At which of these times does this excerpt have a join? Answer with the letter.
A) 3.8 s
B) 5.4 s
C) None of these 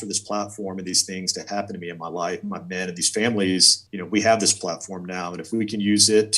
A